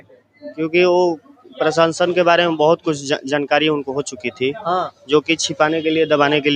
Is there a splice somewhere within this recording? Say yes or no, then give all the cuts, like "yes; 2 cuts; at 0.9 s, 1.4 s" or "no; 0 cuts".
no; 0 cuts